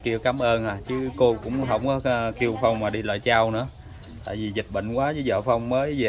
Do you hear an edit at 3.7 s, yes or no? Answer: no